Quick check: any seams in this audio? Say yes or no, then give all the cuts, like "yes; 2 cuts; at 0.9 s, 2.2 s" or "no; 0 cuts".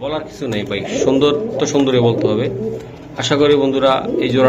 no; 0 cuts